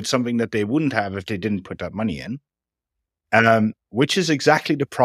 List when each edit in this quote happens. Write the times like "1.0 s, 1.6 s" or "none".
none